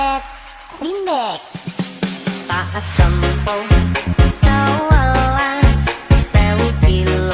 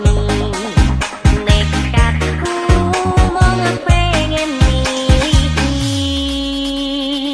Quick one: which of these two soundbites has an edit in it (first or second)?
first